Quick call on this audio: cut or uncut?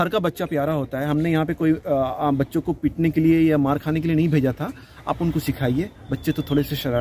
uncut